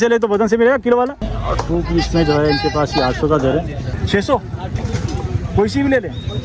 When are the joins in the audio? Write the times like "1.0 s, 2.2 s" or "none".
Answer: 1.4 s, 4.0 s